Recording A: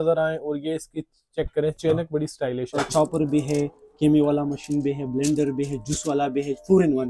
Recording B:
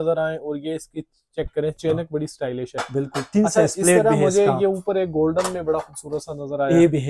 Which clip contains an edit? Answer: A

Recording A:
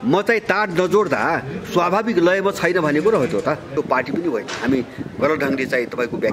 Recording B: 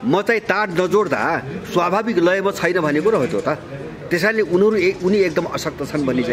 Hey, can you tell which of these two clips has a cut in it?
A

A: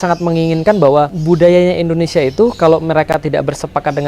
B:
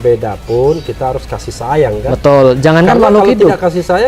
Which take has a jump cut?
A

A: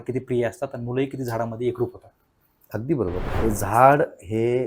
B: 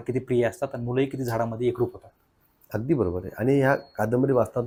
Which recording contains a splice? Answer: A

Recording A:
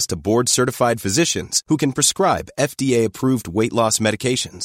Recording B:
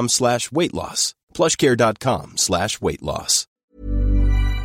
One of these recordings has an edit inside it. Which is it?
B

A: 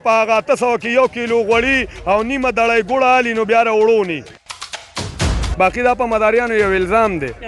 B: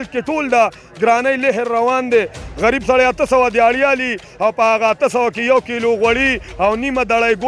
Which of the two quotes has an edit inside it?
A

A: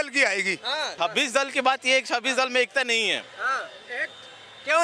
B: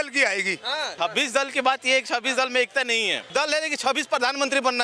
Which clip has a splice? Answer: B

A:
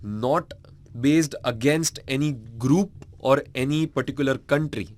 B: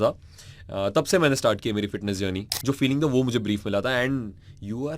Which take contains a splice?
B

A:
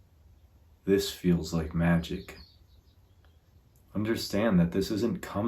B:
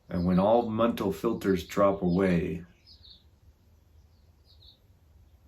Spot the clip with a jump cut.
A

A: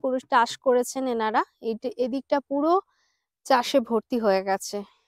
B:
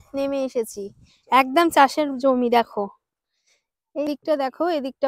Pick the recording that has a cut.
B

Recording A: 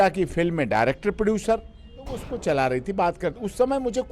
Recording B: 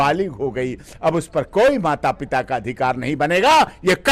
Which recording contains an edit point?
A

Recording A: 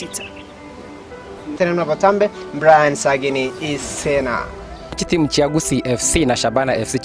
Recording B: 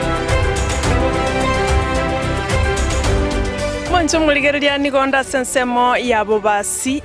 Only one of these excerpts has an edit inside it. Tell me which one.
B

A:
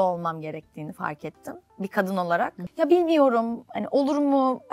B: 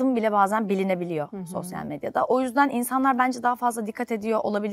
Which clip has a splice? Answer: A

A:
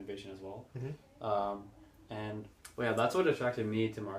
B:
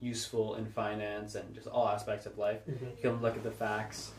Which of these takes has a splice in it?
A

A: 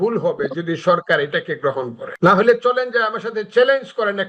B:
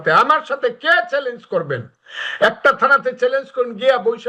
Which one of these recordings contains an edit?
A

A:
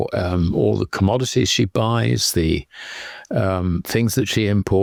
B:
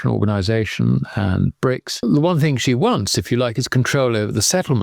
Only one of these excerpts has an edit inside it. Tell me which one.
B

